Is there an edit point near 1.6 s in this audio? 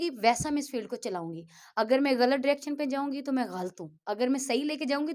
no; 0 cuts

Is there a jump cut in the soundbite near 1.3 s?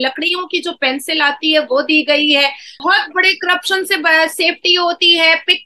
no; 1 cut; at 2.8 s

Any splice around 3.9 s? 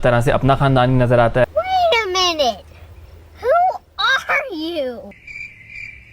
no; 1 cut; at 5.1 s

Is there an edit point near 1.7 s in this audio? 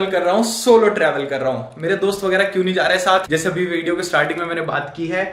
no; 1 cut; at 3.3 s

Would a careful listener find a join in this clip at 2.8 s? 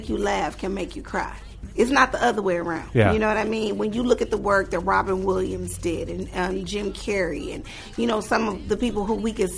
yes; 2 cuts; at 1.7 s, 2.8 s

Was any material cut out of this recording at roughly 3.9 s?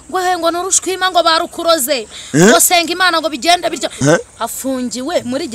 yes; 1 cut; at 3.9 s

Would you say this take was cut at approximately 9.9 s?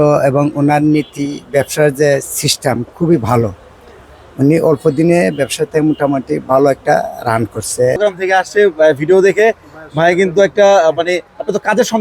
no; 1 cut; at 8.0 s

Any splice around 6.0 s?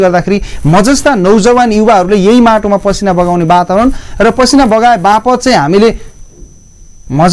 no; 0 cuts

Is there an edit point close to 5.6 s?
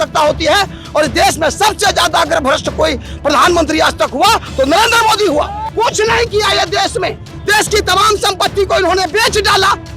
yes; 1 cut; at 5.6 s

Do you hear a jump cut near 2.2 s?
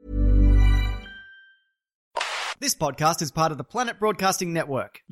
yes; 1 cut; at 2.2 s

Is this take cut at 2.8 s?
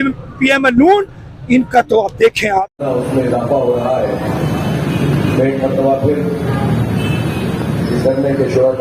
no; 0 cuts

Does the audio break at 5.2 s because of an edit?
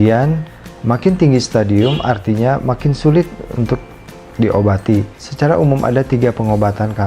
yes; 1 cut; at 5.2 s

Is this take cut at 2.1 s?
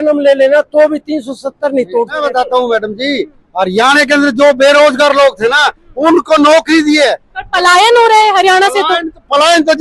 yes; 1 cut; at 2.1 s

